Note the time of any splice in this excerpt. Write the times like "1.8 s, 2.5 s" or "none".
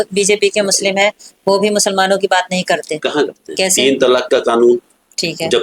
3.5 s